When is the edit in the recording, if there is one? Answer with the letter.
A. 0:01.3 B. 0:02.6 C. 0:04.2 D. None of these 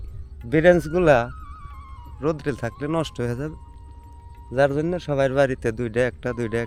D